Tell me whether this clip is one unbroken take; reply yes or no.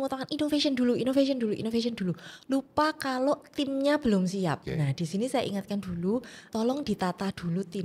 no